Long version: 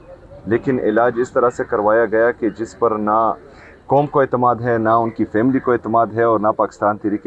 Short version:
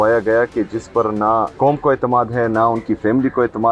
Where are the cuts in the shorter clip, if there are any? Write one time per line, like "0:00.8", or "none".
0:01.5